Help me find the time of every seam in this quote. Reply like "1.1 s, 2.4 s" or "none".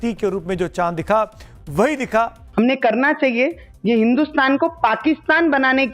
2.4 s